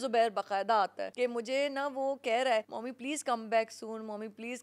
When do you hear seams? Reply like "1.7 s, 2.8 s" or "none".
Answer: 1.0 s, 2.8 s